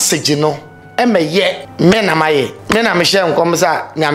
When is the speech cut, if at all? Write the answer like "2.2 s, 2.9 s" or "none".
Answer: 1.6 s, 2.6 s